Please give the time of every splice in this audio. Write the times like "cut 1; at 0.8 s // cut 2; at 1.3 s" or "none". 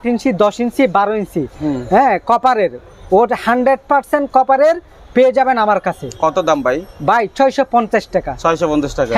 none